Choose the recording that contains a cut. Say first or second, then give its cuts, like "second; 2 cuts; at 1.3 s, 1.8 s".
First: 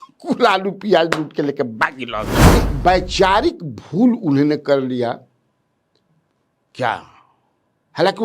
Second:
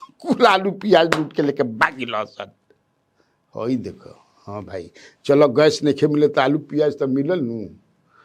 first; 1 cut; at 2.4 s